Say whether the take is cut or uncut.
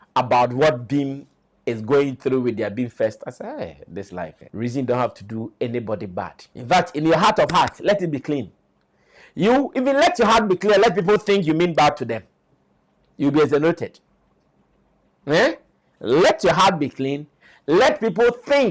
cut